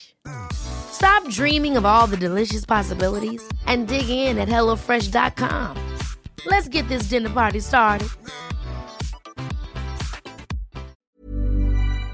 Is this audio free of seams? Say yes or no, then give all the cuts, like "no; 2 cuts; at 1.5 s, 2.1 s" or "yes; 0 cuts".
no; 1 cut; at 11.1 s